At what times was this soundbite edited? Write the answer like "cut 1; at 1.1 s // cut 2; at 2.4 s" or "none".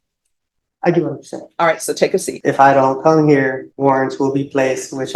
cut 1; at 2.3 s // cut 2; at 3.7 s